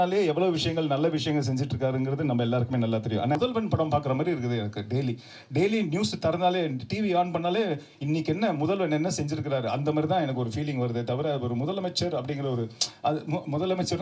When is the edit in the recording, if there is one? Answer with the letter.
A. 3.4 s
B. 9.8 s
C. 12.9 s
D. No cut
A